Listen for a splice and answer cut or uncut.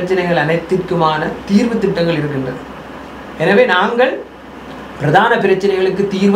uncut